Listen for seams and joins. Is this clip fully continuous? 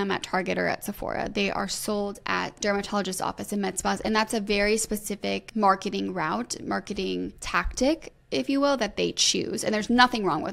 no; 3 cuts; at 2.6 s, 5.4 s, 7.4 s

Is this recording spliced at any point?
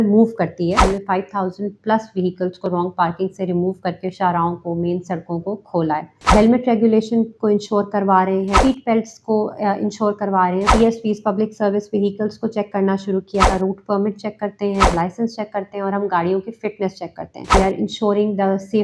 yes; 7 cuts; at 0.8 s, 6.3 s, 8.5 s, 10.7 s, 13.5 s, 14.9 s, 17.5 s

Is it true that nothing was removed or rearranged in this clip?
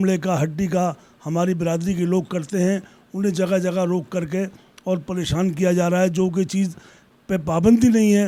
yes; 0 cuts

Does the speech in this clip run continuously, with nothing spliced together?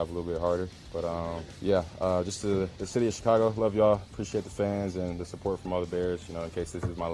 no; 1 cut; at 1.5 s

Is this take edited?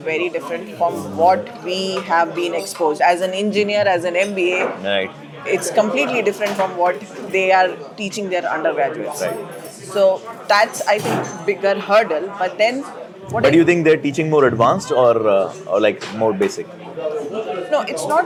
no; 0 cuts

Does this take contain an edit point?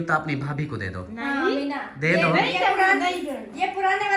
no; 0 cuts

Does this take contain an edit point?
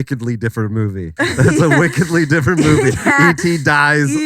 yes; 1 cut; at 1.1 s

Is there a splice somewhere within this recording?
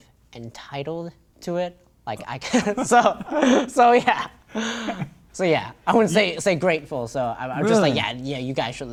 no; 0 cuts

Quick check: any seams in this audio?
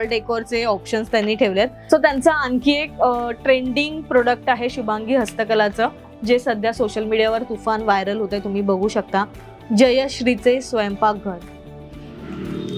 no; 0 cuts

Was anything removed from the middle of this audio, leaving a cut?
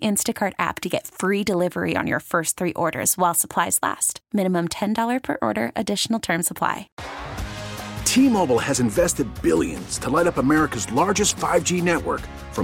yes; 1 cut; at 6.9 s

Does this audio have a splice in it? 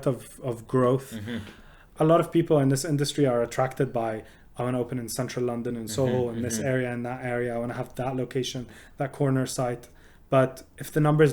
yes; 1 cut; at 1.9 s

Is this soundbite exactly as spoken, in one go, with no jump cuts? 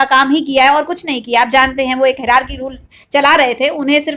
yes; 0 cuts

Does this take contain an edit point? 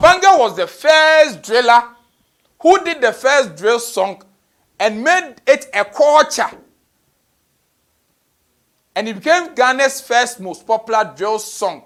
no; 0 cuts

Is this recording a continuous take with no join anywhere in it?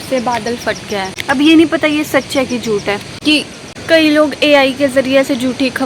no; 2 cuts; at 1.1 s, 3.6 s

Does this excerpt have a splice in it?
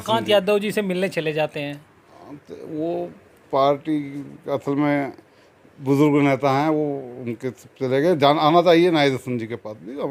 no; 0 cuts

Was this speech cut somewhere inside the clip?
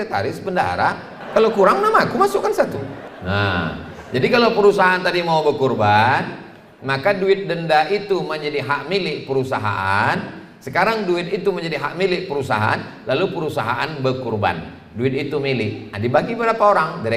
yes; 2 cuts; at 1.1 s, 3.1 s

